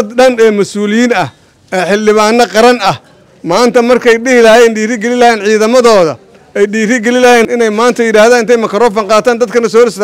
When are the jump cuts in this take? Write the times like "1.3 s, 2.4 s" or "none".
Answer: 7.5 s